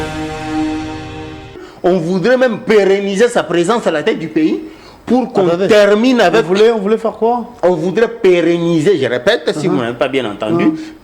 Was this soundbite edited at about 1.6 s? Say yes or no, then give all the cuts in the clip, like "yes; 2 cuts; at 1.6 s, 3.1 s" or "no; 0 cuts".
yes; 1 cut; at 1.6 s